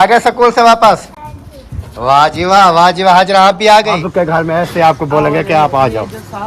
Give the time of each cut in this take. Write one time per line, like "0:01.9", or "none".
0:04.0